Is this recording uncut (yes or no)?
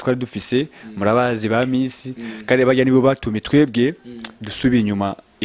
yes